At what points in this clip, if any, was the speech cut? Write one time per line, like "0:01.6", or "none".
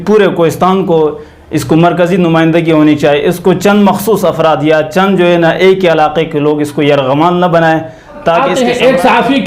0:08.5